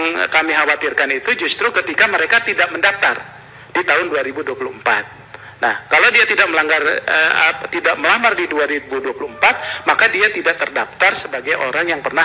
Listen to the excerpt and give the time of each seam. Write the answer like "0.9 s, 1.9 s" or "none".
none